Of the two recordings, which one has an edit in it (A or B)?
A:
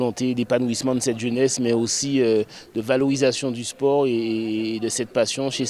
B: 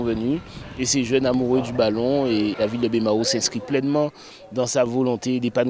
B